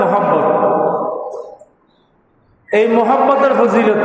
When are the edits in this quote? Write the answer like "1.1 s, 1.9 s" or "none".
none